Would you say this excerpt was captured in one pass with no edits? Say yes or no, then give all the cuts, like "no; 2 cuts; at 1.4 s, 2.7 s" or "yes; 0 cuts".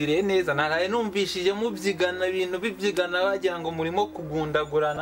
yes; 0 cuts